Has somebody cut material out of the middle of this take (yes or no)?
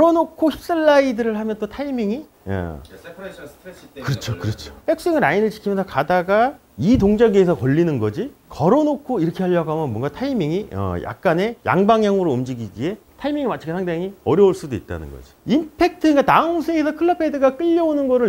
yes